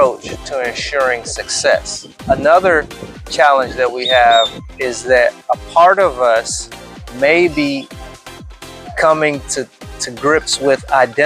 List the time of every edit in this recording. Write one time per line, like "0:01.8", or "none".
0:02.2
0:04.6